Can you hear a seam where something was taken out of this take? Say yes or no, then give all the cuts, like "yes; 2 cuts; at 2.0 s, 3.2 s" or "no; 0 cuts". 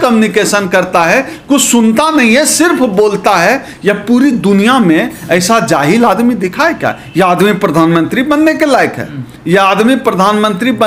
no; 0 cuts